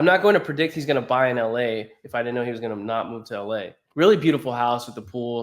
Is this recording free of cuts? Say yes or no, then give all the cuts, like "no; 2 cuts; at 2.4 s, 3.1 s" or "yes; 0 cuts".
no; 1 cut; at 3.8 s